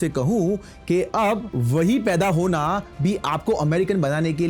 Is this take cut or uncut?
cut